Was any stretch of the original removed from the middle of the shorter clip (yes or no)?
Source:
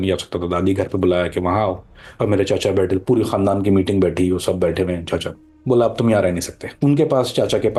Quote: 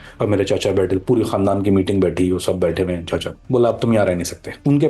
yes